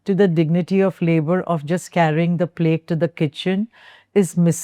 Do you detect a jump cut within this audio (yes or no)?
no